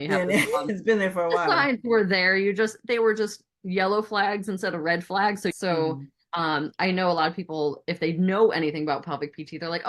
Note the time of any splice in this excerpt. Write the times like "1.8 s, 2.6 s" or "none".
5.5 s